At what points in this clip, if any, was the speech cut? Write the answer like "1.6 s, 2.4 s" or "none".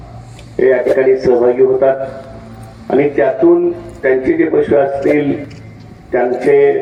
none